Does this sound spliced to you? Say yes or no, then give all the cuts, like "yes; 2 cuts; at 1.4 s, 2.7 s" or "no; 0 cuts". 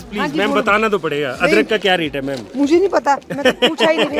no; 0 cuts